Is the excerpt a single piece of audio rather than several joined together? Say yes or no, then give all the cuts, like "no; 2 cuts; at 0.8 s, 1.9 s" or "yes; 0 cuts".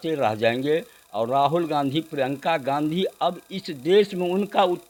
yes; 0 cuts